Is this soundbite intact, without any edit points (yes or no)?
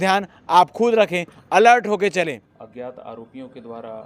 no